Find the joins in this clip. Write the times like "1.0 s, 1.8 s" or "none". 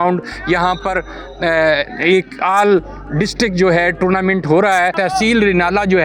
5.0 s